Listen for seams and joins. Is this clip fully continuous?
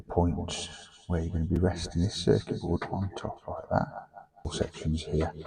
no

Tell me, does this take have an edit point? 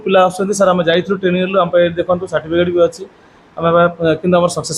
no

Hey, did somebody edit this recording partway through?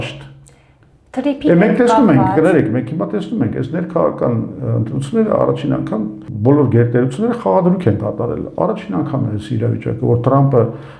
no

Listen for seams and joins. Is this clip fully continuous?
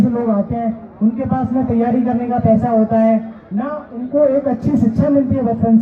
yes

